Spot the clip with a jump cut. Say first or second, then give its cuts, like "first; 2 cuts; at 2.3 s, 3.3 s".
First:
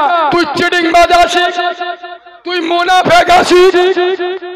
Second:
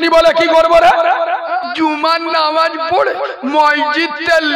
second; 1 cut; at 1.6 s